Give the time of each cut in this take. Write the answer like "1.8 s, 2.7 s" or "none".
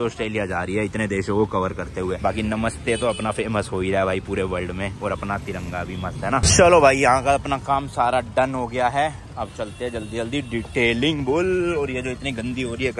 none